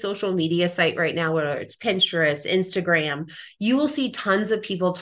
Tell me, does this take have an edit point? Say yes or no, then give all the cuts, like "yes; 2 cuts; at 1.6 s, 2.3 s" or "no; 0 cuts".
no; 0 cuts